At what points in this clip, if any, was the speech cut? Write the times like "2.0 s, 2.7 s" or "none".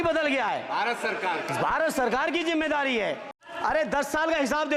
3.4 s